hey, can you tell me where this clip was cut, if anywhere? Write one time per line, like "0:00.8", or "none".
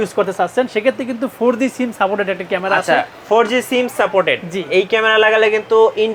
none